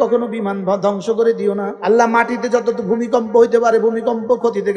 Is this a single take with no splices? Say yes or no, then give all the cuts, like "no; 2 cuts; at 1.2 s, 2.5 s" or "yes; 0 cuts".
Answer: no; 1 cut; at 1.7 s